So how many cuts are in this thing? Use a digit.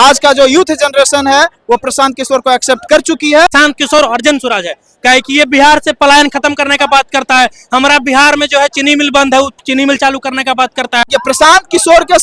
2